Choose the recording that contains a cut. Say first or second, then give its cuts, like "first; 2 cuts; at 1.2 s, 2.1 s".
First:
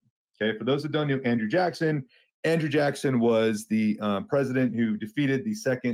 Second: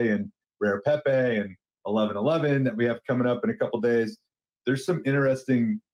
second; 1 cut; at 4.5 s